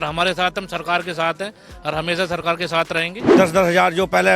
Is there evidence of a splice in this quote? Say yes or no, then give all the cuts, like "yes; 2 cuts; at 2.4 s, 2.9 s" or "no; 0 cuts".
yes; 1 cut; at 3.2 s